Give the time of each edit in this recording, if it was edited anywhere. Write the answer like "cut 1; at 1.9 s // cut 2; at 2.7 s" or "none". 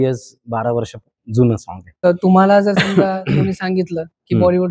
cut 1; at 2.1 s

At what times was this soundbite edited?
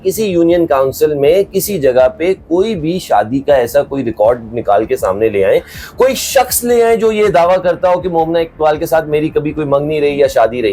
none

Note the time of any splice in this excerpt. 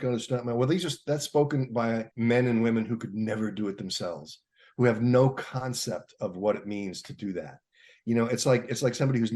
cut 1; at 2.1 s

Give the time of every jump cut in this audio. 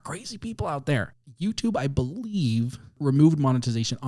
cut 1; at 1.1 s // cut 2; at 2.9 s

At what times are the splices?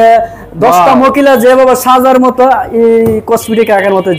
none

